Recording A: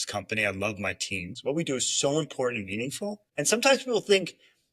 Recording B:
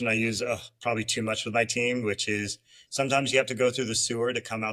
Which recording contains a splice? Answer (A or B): A